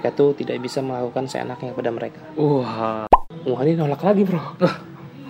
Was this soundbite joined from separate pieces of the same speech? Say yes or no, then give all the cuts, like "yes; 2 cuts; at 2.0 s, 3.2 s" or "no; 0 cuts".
yes; 1 cut; at 3.1 s